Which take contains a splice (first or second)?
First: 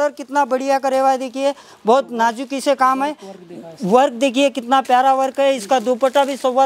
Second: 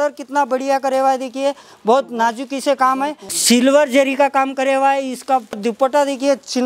second